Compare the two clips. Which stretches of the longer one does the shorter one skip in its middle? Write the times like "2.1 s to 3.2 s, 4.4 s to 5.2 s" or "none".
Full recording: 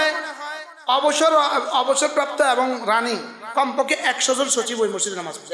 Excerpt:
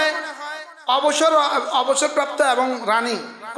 none